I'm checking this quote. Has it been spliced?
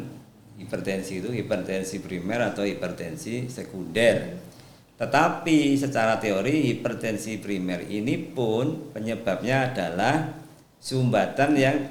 no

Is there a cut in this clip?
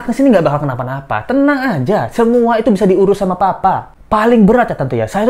no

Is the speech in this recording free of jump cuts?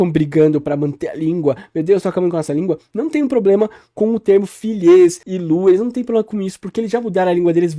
no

